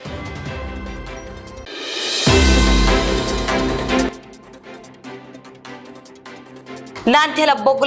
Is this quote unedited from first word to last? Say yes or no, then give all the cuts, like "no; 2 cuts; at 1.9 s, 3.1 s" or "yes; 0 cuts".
no; 2 cuts; at 4.1 s, 6.9 s